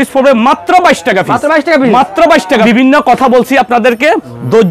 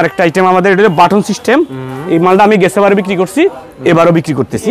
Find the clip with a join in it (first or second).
first